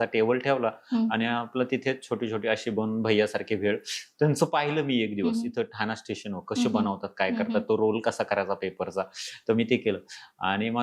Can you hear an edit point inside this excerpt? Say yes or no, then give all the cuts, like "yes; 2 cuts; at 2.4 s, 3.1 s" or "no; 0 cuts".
no; 0 cuts